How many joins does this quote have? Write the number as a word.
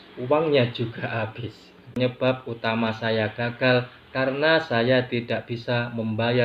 one